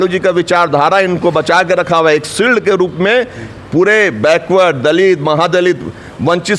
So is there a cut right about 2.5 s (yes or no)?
no